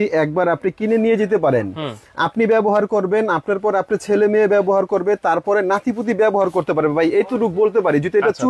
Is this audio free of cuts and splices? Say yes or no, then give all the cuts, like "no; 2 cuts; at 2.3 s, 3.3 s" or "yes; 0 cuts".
yes; 0 cuts